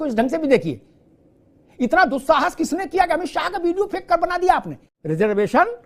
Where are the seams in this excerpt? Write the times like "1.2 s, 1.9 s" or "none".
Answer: 4.8 s